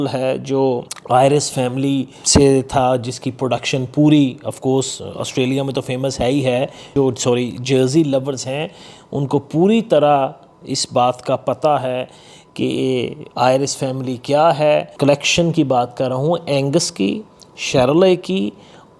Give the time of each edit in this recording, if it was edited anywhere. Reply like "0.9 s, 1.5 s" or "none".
0.9 s, 2.2 s, 6.9 s, 14.9 s